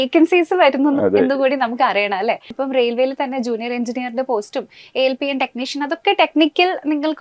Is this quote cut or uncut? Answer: cut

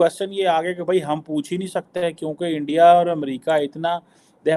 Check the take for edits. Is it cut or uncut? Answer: uncut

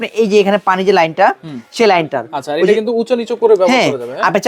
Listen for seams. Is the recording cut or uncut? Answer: uncut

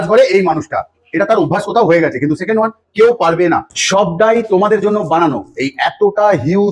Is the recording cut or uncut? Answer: cut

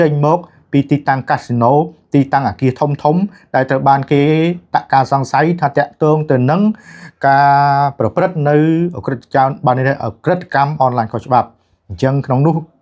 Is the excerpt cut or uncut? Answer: uncut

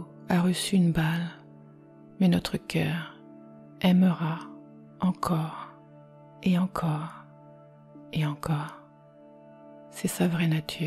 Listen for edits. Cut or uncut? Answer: uncut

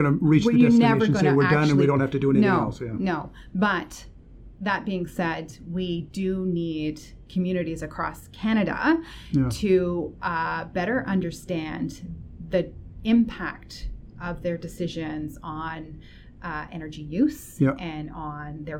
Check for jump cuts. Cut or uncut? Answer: uncut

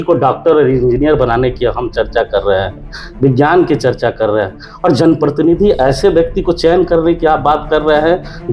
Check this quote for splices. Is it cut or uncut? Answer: uncut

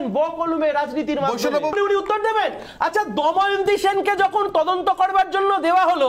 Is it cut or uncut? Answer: cut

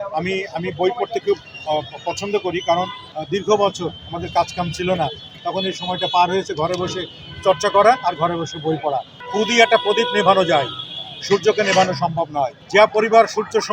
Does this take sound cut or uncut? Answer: cut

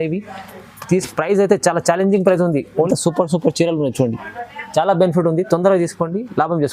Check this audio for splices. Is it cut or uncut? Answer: uncut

